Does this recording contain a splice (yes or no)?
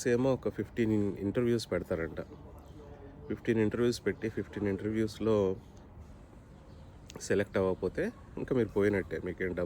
no